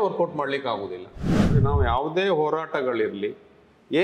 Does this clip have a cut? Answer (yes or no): yes